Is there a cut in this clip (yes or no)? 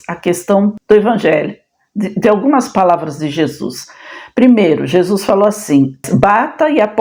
no